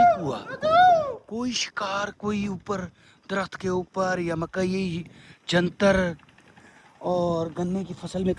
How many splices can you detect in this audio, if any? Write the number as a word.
zero